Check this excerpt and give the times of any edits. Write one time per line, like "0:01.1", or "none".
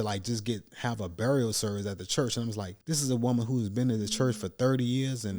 0:02.7